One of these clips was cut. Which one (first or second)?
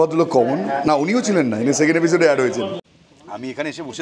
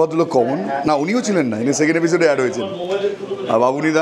first